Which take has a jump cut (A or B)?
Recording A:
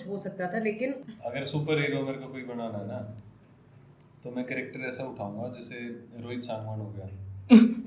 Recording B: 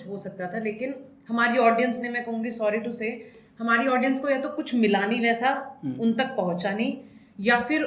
A